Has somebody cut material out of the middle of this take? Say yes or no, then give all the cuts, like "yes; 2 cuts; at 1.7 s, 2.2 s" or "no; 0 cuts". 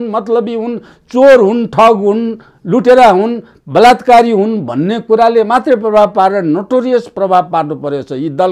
no; 0 cuts